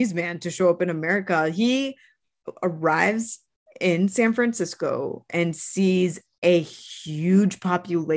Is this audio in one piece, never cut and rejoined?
yes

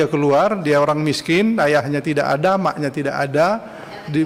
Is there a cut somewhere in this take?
no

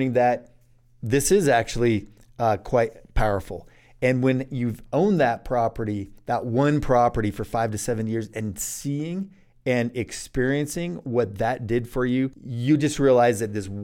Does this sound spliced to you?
yes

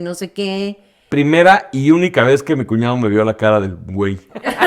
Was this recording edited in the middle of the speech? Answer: yes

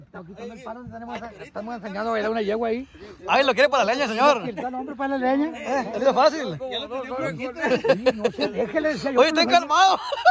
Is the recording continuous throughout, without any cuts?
yes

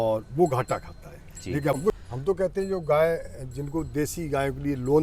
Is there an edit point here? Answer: yes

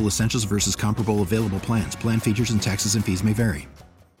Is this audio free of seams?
yes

